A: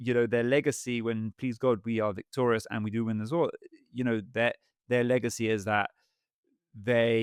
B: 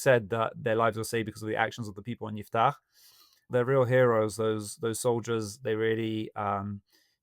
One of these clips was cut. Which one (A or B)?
B